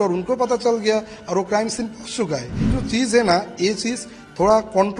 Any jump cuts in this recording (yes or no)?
yes